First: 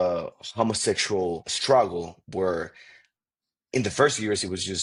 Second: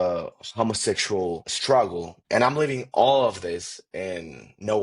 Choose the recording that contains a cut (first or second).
second